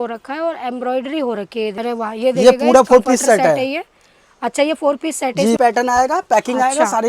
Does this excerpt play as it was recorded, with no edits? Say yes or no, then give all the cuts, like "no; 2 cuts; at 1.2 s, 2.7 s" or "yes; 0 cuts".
no; 2 cuts; at 1.8 s, 5.6 s